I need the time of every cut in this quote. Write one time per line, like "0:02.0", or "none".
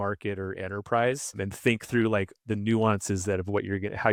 none